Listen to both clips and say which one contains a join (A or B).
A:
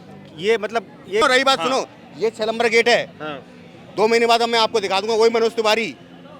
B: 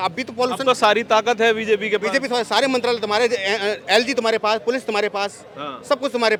A